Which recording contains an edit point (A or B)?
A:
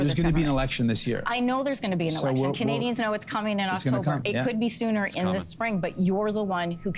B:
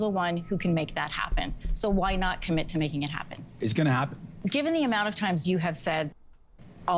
B